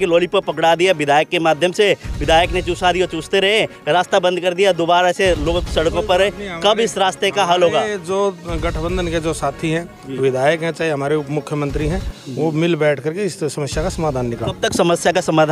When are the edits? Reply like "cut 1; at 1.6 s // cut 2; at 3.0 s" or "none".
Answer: none